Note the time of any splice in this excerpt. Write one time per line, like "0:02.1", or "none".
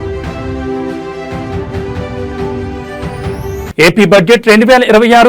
0:02.7